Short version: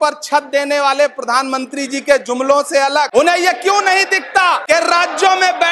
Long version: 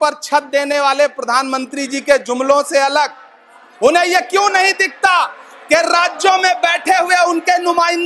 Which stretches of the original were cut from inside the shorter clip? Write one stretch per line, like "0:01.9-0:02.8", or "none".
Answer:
0:03.1-0:03.8
0:05.3-0:05.6